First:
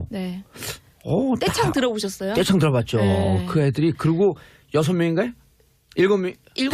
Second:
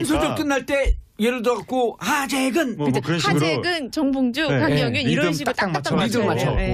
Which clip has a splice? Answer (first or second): first